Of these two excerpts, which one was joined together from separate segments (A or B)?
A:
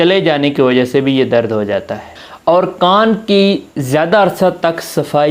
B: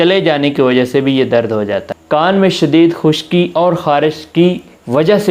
B